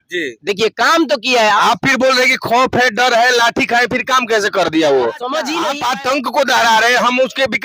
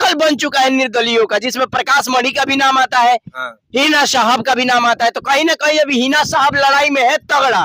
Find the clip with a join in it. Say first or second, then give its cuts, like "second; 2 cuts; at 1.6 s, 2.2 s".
first; 1 cut; at 5.6 s